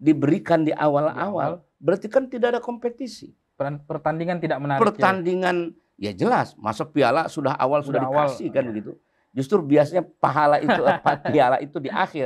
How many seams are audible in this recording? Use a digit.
0